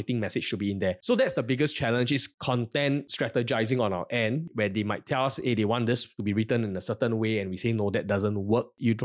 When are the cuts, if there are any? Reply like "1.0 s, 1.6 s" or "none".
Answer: 1.0 s, 2.4 s